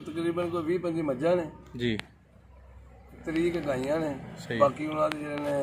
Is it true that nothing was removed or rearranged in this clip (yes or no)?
yes